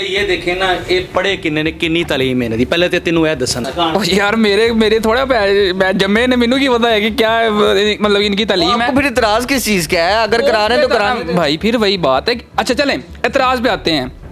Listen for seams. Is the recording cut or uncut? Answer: uncut